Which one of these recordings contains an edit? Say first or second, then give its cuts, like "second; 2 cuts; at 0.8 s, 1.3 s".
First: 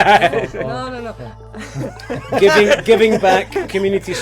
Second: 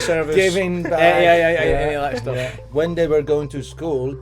second; 1 cut; at 2.6 s